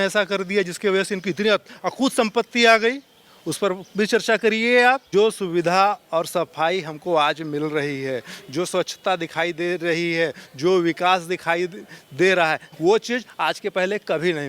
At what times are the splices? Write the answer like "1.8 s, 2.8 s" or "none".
5.0 s, 12.6 s